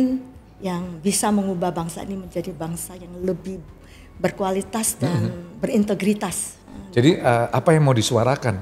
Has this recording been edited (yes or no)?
yes